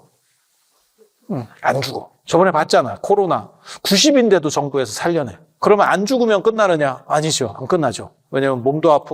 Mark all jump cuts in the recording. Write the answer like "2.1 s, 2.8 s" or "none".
2.1 s, 5.6 s